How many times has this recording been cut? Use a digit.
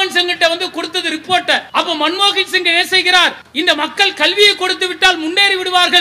2